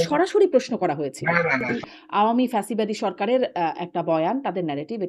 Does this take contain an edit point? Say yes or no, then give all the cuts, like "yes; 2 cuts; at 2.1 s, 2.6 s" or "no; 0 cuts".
yes; 1 cut; at 1.7 s